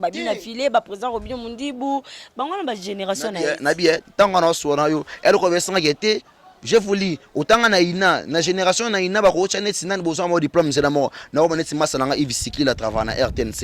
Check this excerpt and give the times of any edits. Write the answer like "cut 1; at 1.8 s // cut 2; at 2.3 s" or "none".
none